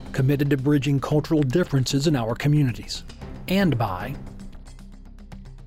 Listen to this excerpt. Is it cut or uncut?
cut